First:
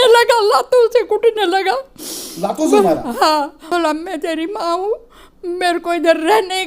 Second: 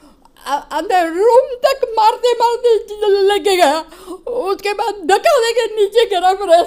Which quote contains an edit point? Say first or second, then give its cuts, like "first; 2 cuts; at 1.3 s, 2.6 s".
first; 1 cut; at 3.7 s